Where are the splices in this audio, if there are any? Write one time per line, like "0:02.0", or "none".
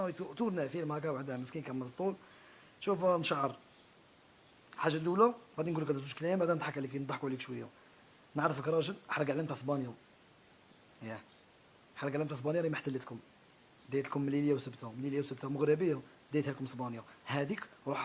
0:16.1